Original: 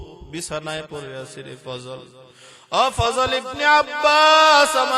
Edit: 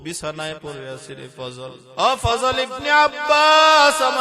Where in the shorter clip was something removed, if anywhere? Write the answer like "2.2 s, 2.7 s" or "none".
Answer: 1.8 s